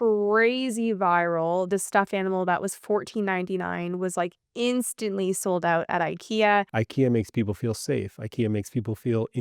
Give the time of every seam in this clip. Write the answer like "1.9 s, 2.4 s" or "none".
1.7 s, 6.7 s